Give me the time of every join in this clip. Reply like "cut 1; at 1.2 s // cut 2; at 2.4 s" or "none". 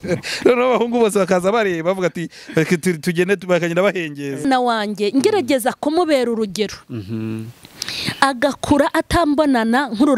cut 1; at 4.4 s